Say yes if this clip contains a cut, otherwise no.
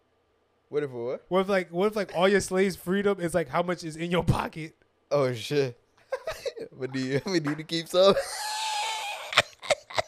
no